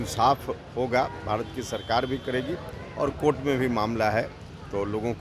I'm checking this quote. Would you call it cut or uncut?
uncut